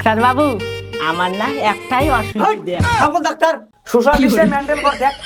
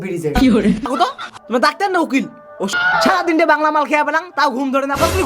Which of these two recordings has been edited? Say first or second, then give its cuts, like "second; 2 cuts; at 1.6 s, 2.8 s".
second; 2 cuts; at 0.9 s, 2.7 s